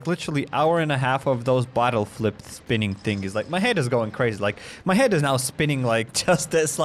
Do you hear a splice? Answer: no; 0 cuts

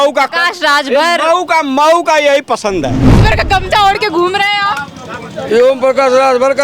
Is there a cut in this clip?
yes; 1 cut; at 3.2 s

